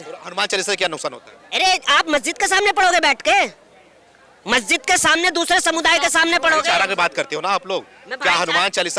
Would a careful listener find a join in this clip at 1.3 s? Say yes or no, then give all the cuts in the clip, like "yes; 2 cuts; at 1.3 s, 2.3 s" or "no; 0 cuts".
no; 0 cuts